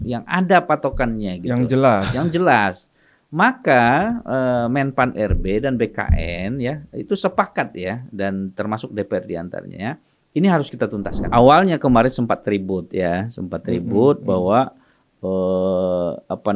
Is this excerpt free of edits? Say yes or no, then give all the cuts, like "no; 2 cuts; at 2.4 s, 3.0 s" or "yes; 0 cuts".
no; 1 cut; at 11.2 s